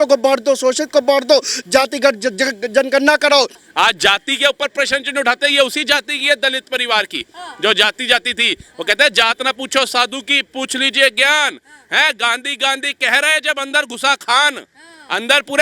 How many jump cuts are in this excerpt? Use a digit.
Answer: 1